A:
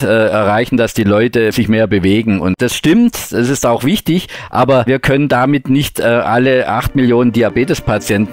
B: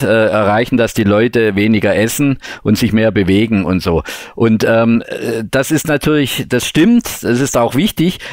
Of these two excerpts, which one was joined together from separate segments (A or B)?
A